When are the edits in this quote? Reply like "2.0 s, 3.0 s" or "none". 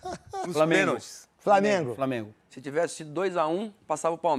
none